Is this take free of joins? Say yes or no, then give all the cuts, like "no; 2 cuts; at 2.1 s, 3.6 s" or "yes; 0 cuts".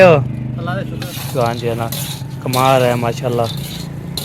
no; 1 cut; at 1.1 s